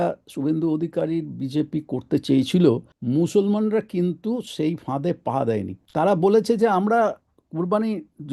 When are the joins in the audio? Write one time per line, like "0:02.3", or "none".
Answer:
0:02.9
0:05.8